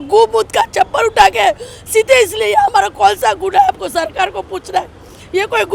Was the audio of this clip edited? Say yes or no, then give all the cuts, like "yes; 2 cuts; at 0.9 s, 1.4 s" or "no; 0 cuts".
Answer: no; 0 cuts